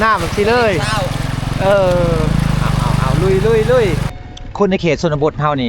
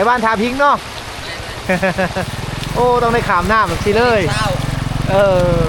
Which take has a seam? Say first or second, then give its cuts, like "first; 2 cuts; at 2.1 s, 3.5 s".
first; 1 cut; at 4.1 s